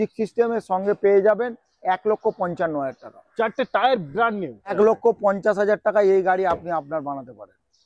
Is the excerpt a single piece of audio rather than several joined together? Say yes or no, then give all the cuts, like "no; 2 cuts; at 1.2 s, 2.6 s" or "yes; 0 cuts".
no; 1 cut; at 4.7 s